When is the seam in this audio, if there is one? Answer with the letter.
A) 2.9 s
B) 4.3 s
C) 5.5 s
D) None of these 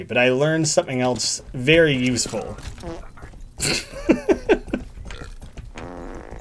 D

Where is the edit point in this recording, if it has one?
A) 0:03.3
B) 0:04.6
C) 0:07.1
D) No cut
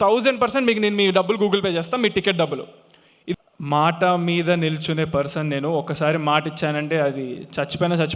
A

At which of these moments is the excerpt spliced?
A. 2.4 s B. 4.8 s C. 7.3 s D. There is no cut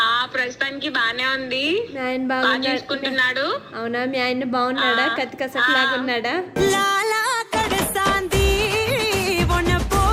D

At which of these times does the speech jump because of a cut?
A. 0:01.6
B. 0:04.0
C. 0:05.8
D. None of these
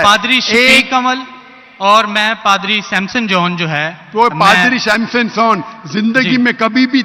D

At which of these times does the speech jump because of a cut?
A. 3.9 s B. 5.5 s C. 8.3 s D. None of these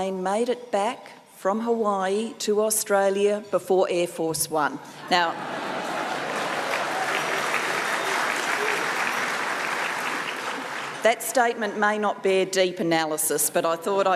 B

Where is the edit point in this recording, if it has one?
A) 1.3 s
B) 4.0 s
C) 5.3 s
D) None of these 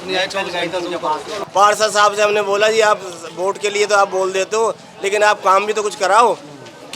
A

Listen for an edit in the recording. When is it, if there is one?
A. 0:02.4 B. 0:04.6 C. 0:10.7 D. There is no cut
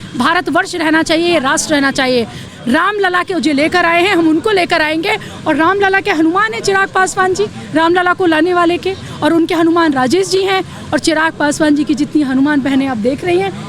A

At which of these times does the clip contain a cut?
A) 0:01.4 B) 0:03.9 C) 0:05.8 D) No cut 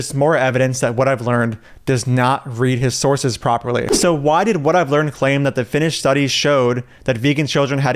B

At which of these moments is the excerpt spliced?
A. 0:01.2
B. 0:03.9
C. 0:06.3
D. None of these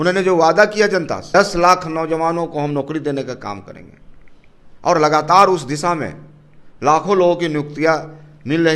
A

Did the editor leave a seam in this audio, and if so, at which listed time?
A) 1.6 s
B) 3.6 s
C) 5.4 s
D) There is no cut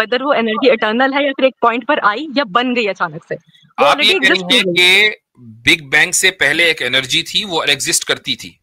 D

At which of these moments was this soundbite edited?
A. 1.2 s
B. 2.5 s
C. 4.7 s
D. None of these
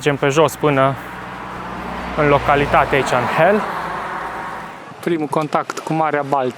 C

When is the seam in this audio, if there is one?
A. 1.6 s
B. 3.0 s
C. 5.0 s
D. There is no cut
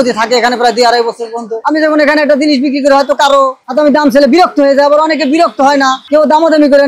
A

